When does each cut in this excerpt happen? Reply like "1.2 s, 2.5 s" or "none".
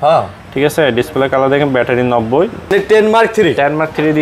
2.7 s

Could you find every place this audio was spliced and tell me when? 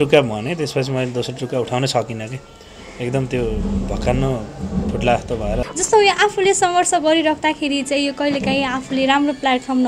5.6 s

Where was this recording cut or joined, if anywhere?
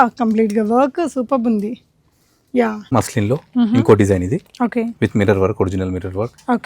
2.9 s

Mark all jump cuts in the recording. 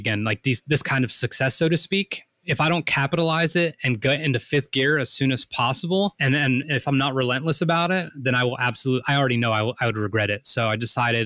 2.4 s, 6.2 s

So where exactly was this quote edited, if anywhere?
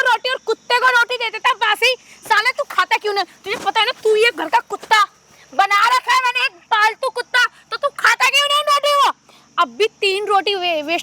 none

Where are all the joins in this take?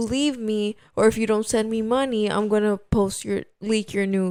none

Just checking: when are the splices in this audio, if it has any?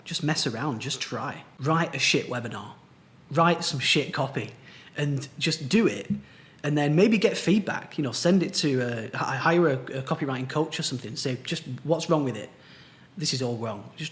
1.4 s

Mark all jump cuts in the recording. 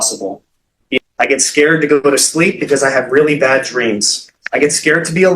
1.0 s

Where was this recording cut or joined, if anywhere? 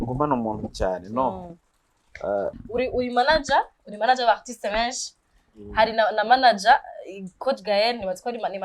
2.6 s

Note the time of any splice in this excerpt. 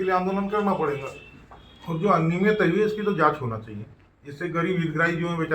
none

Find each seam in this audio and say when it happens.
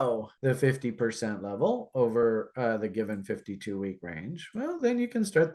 none

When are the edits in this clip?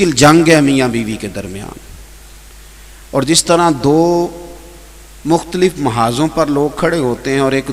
none

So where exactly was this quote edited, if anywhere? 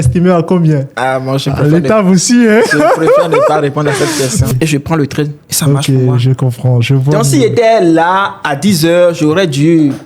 4.5 s

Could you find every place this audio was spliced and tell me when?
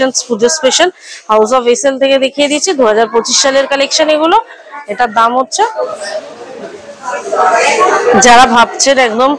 5.7 s

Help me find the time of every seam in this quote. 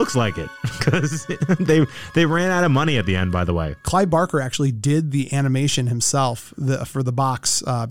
none

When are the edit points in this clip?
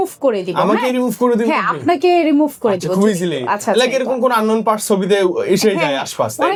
none

